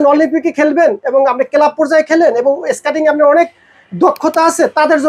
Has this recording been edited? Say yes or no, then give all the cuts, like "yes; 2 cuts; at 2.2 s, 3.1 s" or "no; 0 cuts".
no; 0 cuts